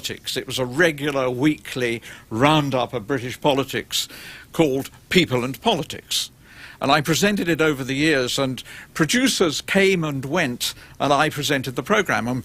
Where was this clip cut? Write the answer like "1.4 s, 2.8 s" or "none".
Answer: 4.2 s

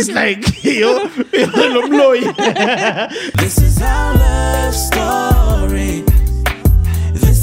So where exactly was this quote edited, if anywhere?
3.3 s

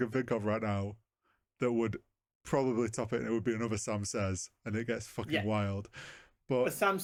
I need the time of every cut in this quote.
none

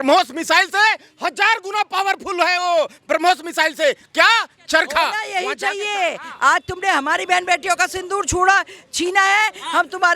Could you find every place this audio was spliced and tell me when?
5.3 s

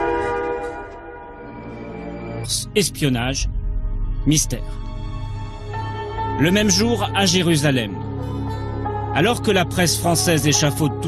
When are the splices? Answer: none

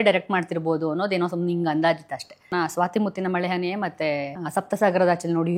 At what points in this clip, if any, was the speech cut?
2.5 s, 4.4 s

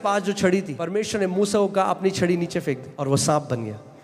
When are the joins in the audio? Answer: 1.0 s, 2.9 s

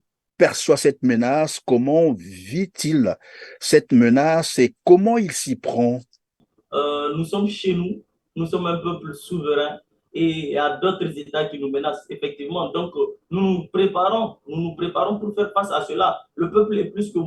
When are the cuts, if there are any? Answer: 6.5 s

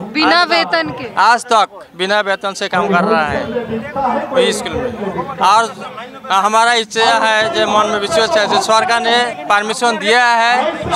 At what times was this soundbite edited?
none

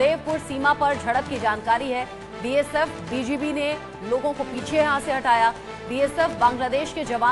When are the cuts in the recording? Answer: none

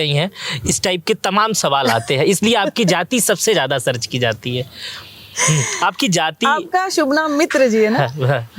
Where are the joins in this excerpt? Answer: none

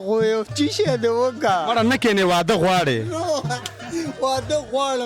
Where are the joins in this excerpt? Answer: none

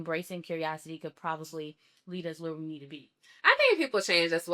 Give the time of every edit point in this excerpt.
3.3 s

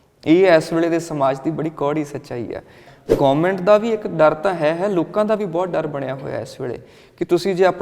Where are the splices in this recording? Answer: 2.8 s

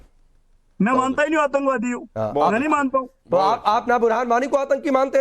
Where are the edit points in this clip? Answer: 3.4 s

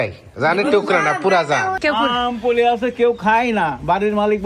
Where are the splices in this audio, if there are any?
1.8 s

